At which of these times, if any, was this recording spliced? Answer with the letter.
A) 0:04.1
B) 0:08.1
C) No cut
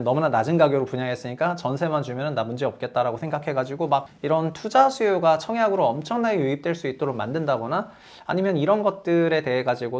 A